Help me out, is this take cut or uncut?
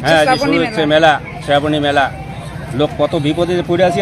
uncut